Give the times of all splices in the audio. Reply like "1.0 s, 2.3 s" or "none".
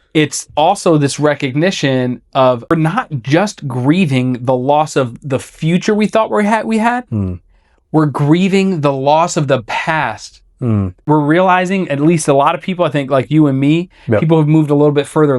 2.7 s, 11.0 s